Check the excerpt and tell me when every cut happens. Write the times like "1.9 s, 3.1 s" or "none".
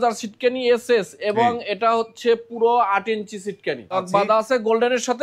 4.0 s